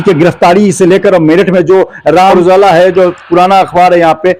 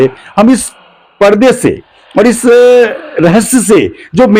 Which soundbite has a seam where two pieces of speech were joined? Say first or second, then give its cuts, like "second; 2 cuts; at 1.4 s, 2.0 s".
first; 1 cut; at 2.3 s